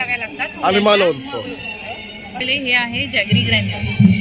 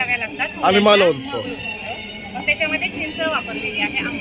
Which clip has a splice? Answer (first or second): first